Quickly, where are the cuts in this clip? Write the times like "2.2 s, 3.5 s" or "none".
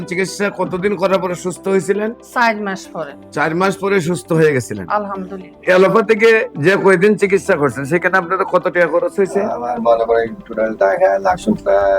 5.6 s